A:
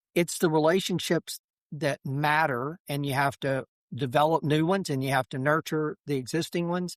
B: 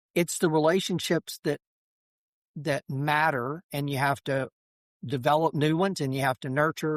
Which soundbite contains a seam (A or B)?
A